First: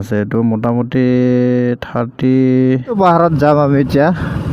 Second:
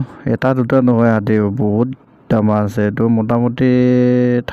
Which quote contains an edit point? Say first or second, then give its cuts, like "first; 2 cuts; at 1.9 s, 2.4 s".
first; 1 cut; at 2.9 s